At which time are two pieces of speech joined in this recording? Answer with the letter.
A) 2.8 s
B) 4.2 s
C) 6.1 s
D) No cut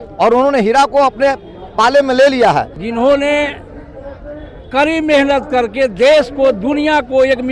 A